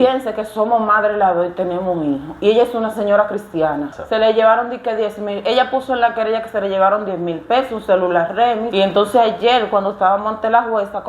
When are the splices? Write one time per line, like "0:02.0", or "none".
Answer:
0:04.0
0:08.7